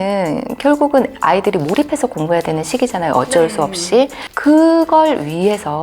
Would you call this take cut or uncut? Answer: cut